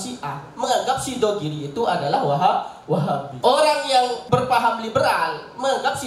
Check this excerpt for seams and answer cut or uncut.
cut